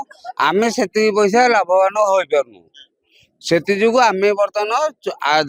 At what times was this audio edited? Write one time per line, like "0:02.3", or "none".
none